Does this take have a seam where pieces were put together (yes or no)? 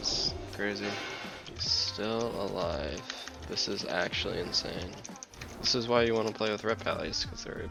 no